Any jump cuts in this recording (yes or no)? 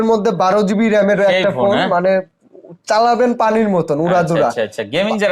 no